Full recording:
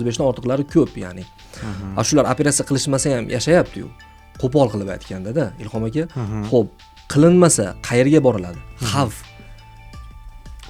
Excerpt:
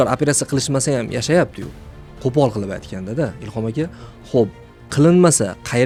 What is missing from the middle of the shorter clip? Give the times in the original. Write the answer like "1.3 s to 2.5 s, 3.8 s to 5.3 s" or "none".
none